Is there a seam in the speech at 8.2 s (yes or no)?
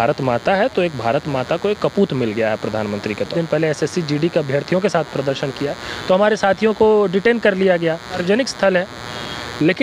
yes